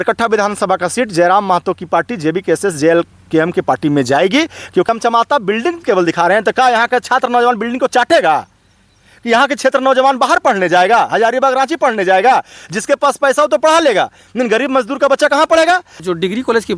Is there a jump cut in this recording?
yes; 2 cuts; at 4.9 s, 16.0 s

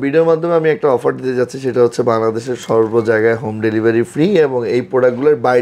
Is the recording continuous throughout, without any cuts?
yes; 0 cuts

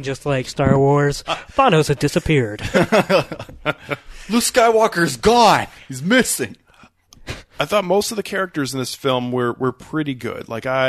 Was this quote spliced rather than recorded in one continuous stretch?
no; 0 cuts

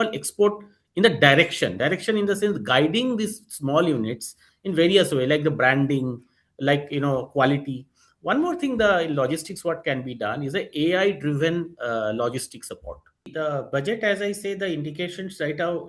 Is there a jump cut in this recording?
yes; 1 cut; at 13.3 s

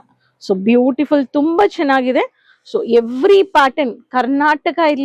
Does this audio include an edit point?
no; 0 cuts

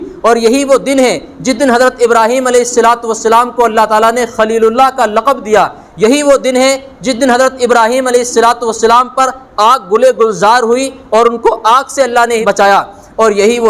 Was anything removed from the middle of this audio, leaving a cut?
no; 0 cuts

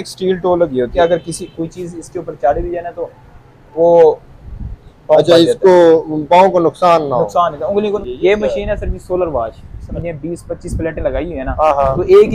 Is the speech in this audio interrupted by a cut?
yes; 3 cuts; at 0.9 s, 8.0 s, 9.6 s

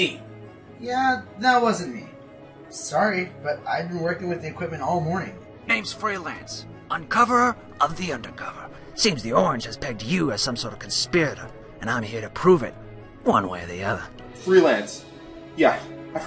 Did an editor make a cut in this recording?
no; 0 cuts

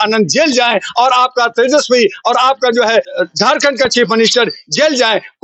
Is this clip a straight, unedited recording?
no; 1 cut; at 3.1 s

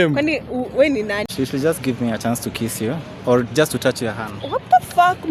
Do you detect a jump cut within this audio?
yes; 1 cut; at 1.3 s

